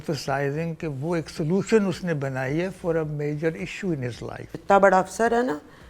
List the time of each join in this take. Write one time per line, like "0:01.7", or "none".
0:04.5